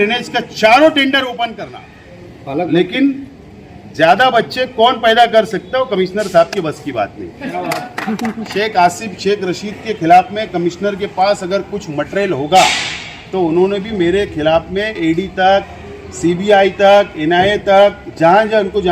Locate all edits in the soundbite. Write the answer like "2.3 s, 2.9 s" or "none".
1.6 s, 8.3 s